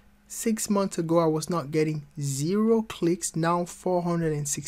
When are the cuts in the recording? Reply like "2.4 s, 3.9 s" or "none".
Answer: none